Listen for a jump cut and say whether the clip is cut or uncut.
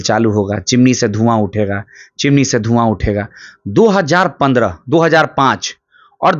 uncut